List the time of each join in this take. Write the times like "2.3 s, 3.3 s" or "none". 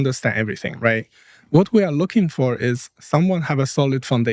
none